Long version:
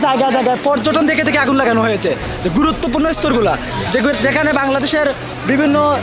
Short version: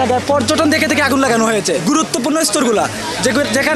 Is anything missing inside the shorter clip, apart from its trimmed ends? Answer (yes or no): yes